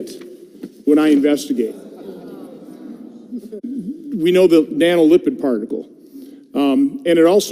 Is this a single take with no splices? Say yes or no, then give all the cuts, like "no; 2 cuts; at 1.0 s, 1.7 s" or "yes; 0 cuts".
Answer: yes; 0 cuts